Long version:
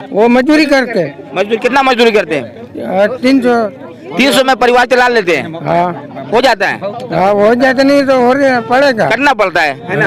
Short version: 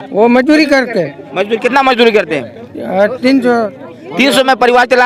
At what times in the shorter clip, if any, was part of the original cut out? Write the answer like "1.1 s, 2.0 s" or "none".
none